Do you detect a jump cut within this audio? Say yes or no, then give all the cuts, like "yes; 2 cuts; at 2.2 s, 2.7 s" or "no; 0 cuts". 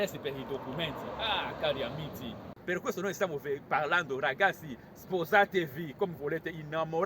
yes; 1 cut; at 2.4 s